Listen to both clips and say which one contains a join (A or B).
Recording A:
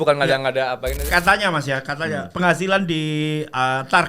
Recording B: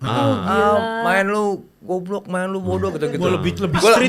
A